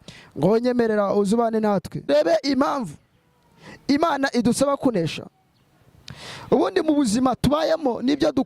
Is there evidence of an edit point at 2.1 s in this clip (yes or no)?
yes